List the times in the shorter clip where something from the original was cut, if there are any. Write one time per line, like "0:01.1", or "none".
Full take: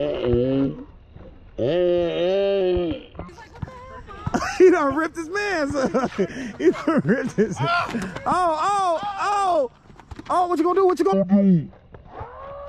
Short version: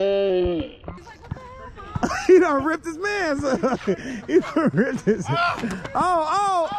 none